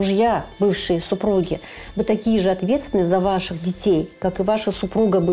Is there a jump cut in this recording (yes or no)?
no